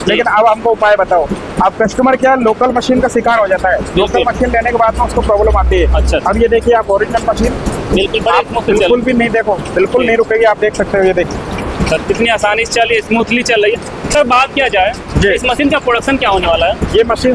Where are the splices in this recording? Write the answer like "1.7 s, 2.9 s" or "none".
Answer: none